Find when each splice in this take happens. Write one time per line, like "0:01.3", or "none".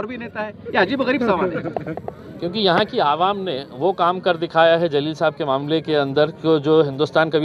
none